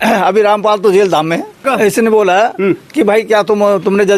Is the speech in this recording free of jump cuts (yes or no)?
no